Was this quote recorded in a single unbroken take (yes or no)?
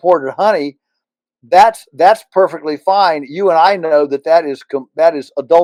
yes